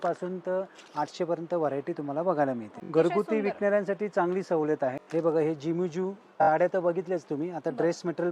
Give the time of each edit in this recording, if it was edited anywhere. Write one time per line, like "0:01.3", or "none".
0:02.7
0:05.0
0:06.3